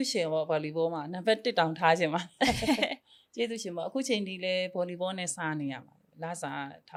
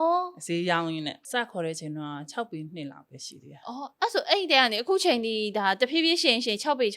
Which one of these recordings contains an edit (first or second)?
second